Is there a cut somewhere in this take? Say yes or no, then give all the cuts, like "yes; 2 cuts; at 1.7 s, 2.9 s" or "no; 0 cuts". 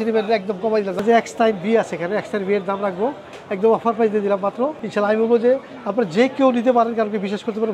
yes; 2 cuts; at 1.0 s, 4.8 s